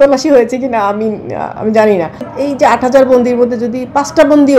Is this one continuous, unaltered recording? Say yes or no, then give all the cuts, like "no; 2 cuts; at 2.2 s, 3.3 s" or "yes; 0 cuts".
no; 1 cut; at 2.3 s